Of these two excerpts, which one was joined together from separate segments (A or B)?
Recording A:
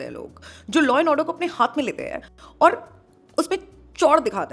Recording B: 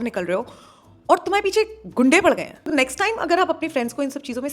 B